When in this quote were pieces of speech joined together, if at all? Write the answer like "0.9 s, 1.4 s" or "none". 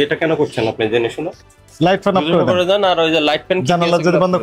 1.6 s